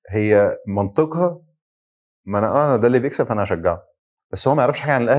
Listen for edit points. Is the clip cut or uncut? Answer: uncut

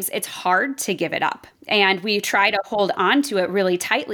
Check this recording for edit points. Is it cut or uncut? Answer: cut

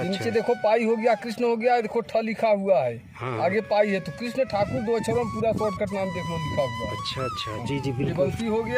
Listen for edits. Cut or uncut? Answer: uncut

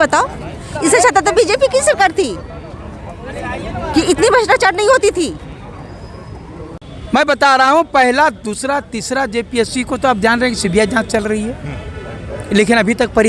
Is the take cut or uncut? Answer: cut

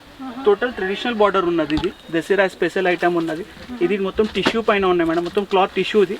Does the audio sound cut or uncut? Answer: cut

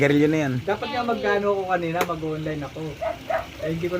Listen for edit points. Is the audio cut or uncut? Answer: cut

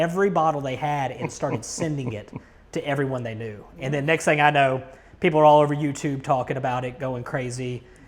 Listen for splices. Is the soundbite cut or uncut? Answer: uncut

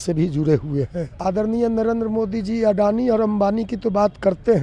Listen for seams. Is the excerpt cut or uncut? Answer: cut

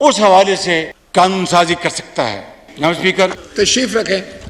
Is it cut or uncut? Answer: cut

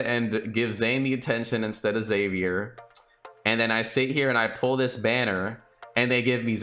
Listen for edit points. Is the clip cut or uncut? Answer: uncut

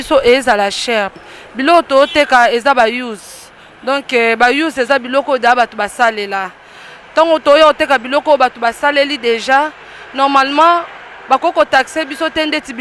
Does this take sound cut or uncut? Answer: cut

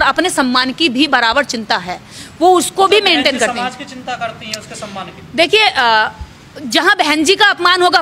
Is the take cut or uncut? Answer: uncut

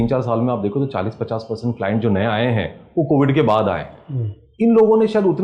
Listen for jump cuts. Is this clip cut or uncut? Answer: uncut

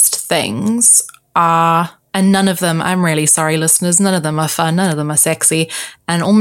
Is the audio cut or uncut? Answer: cut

